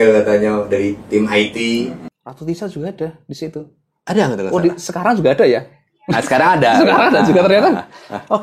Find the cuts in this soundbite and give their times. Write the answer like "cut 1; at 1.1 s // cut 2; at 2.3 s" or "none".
cut 1; at 2.0 s